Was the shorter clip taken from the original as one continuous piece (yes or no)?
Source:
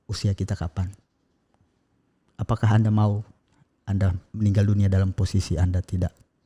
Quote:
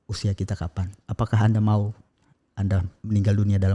no